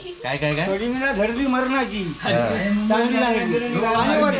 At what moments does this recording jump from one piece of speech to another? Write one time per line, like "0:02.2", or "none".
none